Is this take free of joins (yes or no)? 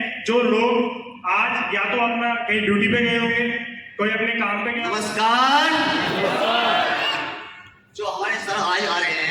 no